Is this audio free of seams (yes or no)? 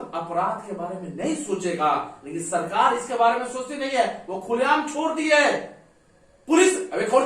yes